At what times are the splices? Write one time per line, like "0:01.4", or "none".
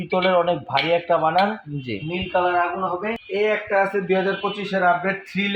0:03.2